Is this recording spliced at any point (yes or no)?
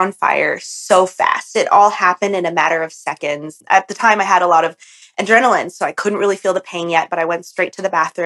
yes